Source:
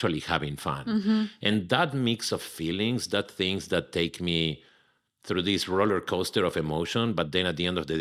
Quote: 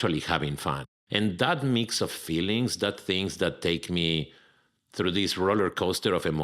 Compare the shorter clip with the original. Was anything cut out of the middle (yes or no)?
yes